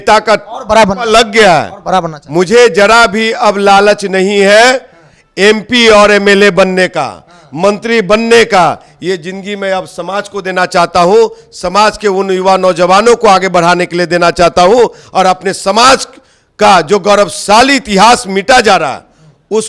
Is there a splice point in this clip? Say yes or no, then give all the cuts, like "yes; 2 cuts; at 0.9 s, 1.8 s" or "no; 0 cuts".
no; 0 cuts